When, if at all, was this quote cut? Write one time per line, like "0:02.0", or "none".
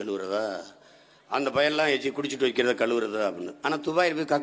none